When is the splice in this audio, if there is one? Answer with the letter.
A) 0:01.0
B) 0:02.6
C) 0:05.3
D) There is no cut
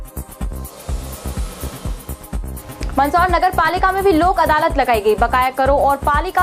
B